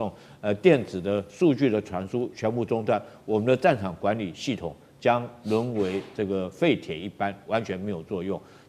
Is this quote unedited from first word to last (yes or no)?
yes